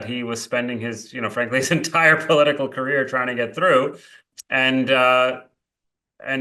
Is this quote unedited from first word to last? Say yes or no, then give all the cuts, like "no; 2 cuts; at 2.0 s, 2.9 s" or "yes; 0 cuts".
no; 1 cut; at 4.3 s